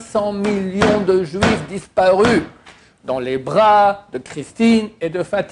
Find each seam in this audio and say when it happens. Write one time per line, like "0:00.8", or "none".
none